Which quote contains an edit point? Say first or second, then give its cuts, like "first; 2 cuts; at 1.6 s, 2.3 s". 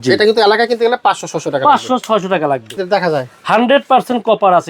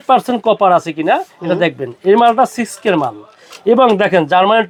first; 1 cut; at 2.7 s